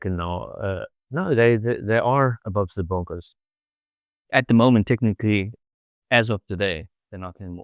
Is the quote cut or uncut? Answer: uncut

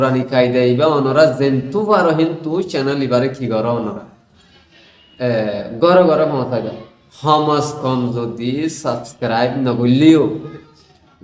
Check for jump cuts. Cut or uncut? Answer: uncut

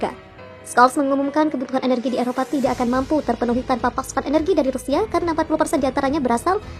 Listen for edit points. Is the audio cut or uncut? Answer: uncut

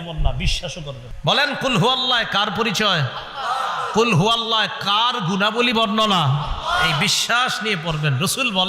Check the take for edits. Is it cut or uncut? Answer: cut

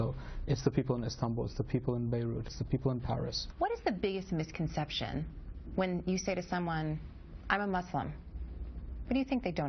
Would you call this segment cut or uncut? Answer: cut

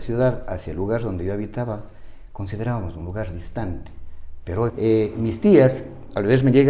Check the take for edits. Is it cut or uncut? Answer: cut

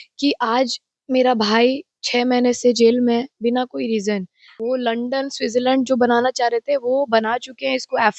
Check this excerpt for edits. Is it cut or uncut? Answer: cut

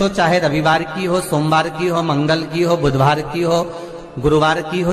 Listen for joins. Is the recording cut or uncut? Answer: uncut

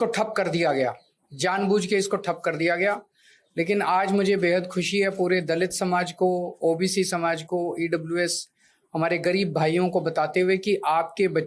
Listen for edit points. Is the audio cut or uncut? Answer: uncut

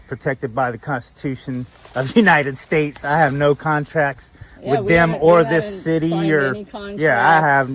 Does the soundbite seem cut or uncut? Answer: uncut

